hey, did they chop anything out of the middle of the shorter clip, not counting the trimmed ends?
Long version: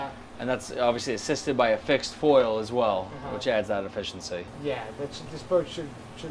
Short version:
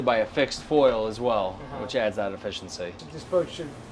yes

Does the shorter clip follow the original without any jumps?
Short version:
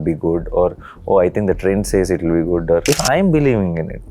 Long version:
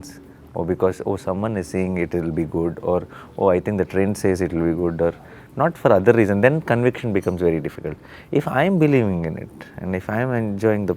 no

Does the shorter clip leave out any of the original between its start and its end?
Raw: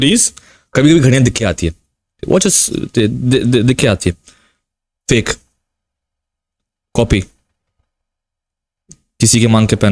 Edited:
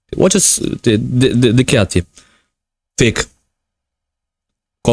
no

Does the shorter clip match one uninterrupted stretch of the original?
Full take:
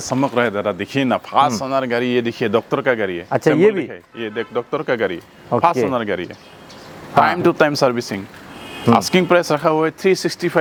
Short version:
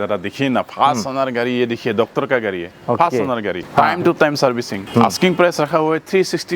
no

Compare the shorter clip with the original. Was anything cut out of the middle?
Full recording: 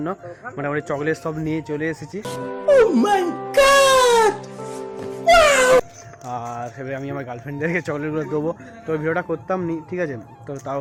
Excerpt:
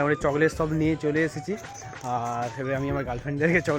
yes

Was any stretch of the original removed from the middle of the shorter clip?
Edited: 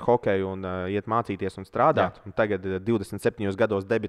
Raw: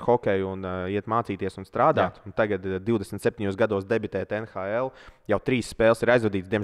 no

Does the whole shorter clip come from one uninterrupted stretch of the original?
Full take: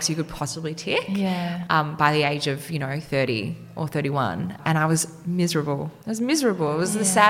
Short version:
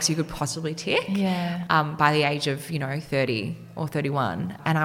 yes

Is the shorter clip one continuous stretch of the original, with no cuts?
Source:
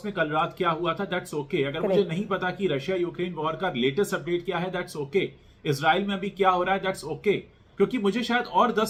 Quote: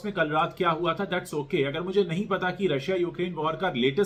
yes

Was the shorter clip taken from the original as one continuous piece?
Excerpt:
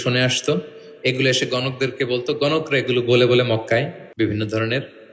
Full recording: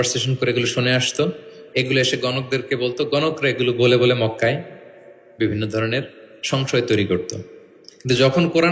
no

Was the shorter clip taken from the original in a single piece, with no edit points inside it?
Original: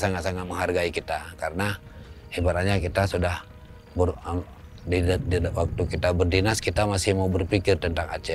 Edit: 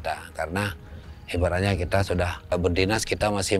no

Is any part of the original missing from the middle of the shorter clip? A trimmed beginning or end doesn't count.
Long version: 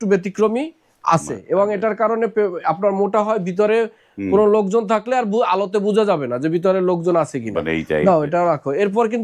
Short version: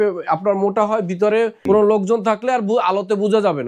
yes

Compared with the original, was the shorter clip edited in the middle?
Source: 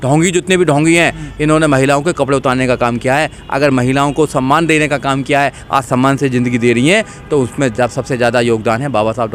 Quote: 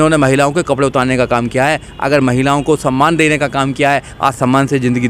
no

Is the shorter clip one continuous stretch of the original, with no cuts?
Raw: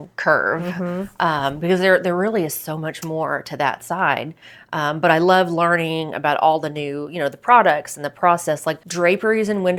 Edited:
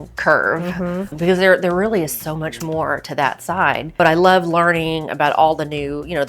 no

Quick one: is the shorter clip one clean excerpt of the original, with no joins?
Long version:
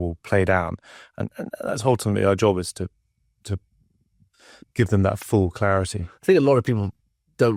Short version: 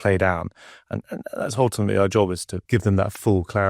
no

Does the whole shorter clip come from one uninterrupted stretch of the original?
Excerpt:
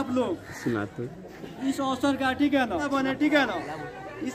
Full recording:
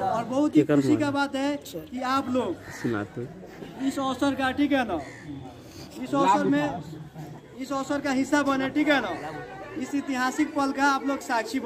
no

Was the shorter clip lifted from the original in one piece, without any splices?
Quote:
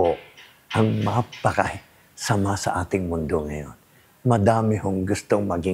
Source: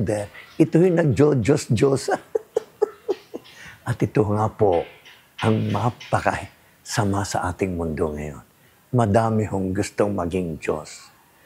yes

